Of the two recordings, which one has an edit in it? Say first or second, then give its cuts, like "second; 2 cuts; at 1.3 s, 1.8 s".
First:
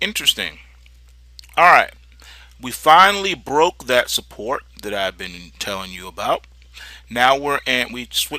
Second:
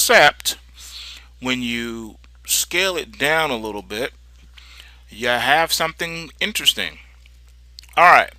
second; 1 cut; at 5.5 s